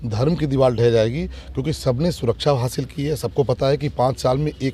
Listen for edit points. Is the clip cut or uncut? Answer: uncut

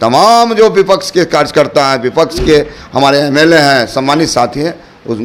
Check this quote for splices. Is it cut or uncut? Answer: uncut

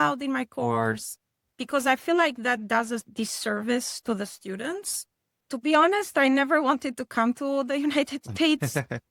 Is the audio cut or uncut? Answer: cut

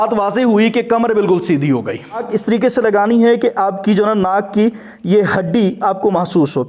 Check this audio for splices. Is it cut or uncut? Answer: cut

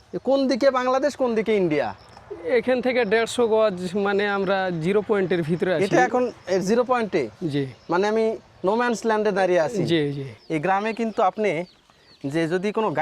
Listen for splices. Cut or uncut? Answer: cut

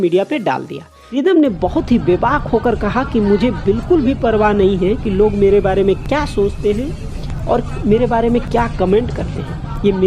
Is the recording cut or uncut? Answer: cut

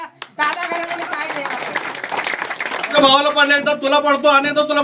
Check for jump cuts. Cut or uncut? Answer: cut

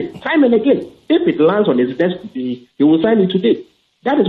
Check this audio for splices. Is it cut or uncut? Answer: uncut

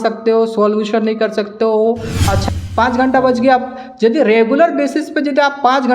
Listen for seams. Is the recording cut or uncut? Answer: cut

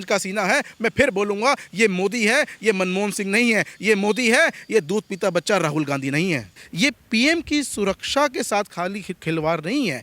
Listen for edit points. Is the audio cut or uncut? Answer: cut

